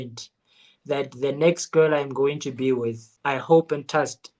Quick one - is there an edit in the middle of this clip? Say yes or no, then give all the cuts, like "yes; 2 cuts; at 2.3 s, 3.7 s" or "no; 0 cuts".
yes; 1 cut; at 3.1 s